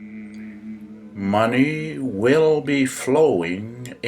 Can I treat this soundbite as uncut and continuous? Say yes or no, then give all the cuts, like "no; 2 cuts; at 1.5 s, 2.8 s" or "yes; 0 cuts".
no; 1 cut; at 1.1 s